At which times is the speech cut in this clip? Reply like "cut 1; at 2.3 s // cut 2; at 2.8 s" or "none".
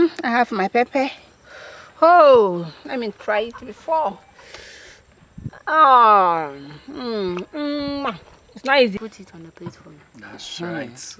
cut 1; at 9.0 s